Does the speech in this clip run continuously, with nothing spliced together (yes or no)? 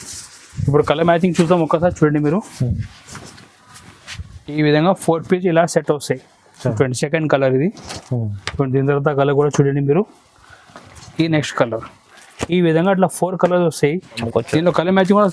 no